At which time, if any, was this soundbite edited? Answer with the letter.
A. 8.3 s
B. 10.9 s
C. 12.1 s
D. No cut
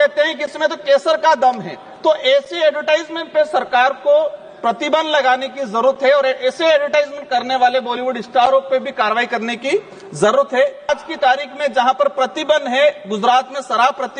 B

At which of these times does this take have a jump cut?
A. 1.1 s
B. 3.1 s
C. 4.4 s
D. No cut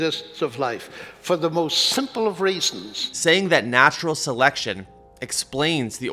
B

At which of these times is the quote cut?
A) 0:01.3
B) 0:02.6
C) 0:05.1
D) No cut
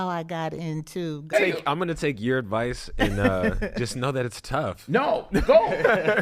A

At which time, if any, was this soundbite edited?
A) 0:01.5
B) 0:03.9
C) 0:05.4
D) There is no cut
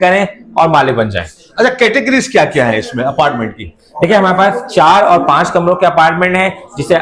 D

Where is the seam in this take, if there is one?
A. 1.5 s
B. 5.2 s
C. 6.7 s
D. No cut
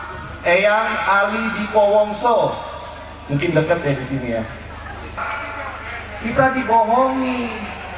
B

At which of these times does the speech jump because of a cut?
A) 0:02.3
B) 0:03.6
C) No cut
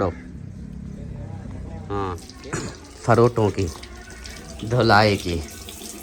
A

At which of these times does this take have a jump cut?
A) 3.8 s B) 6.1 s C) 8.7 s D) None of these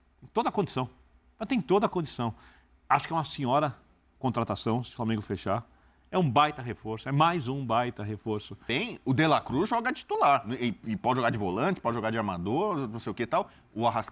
C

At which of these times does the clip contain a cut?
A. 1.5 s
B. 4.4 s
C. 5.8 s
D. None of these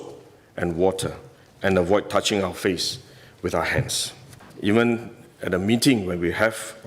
B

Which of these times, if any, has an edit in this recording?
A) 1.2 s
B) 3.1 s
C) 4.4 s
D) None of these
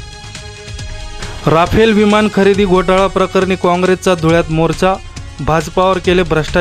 A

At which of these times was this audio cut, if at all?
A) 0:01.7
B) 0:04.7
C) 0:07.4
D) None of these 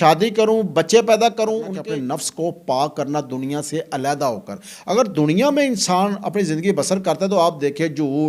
A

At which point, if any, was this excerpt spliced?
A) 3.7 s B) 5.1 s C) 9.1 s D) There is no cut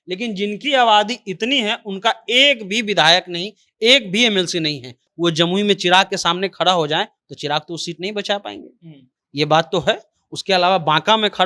B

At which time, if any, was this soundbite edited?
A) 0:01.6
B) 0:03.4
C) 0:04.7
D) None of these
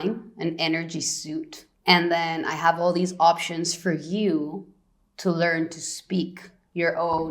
A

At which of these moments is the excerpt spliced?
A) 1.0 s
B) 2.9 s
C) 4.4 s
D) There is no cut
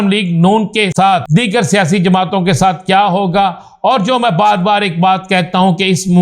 A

